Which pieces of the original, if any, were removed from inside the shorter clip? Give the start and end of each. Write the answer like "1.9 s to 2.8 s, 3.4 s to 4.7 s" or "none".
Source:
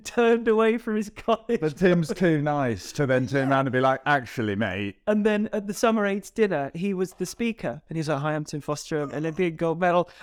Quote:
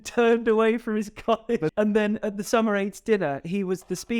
1.7 s to 5.0 s